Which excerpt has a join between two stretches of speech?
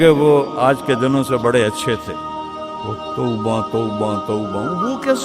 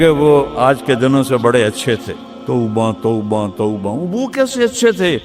second; 1 cut; at 2.3 s

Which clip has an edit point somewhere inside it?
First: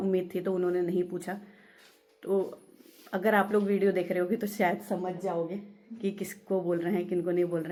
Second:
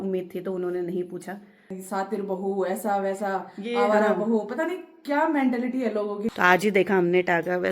second; 2 cuts; at 1.8 s, 6.2 s

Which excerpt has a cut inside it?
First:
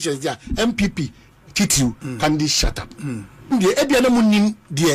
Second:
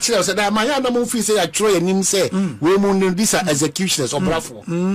first; 1 cut; at 3.5 s

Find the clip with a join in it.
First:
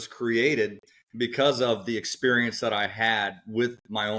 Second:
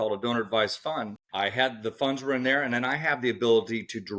second; 1 cut; at 1.2 s

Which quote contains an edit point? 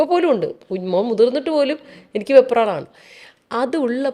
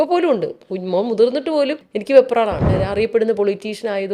second; 2 cuts; at 1.9 s, 2.7 s

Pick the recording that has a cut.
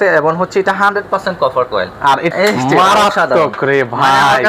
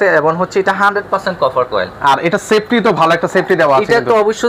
first; 1 cut; at 2.3 s

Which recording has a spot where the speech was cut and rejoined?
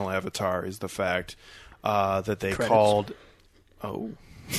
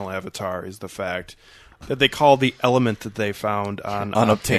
second; 1 cut; at 1.8 s

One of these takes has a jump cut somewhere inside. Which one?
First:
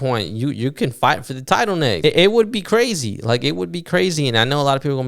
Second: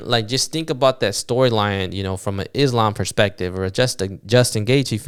first; 1 cut; at 2.0 s

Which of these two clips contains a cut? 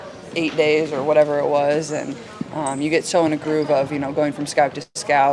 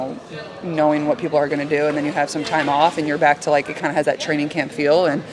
second; 1 cut; at 3.4 s

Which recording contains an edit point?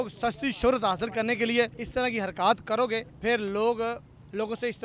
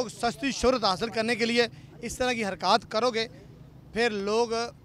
first; 2 cuts; at 1.8 s, 3.1 s

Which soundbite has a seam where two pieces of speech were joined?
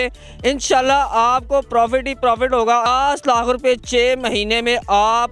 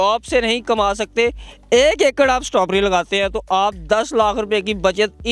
first; 1 cut; at 2.9 s

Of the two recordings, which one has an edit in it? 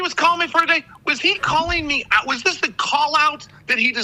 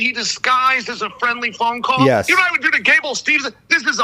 second; 1 cut; at 2.3 s

